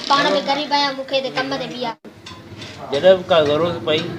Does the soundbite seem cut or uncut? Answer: cut